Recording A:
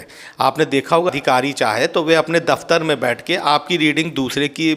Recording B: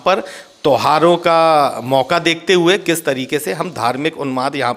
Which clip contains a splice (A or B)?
A